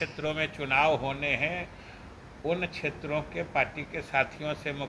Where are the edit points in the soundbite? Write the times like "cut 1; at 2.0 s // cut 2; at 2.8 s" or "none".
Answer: none